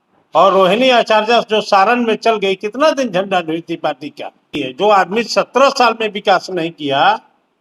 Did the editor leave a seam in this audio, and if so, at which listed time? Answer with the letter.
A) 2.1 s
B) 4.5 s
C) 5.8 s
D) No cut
B